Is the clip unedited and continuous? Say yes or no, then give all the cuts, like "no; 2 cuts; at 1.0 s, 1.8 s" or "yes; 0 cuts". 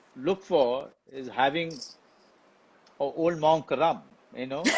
yes; 0 cuts